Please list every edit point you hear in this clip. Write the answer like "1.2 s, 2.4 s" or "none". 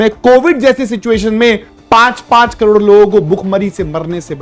none

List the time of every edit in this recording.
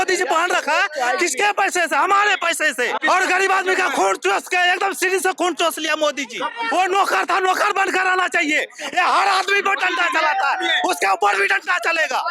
3.0 s, 6.5 s

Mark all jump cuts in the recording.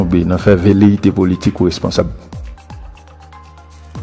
2.1 s

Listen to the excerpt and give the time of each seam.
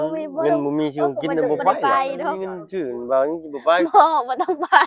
2.6 s

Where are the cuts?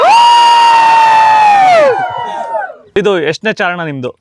2.8 s

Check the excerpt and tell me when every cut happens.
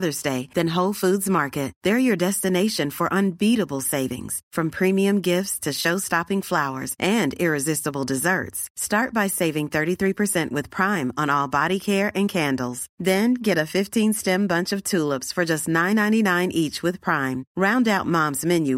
none

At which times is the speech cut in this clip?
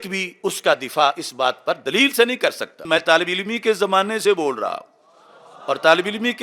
2.8 s

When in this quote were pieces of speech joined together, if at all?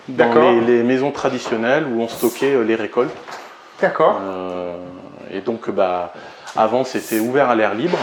none

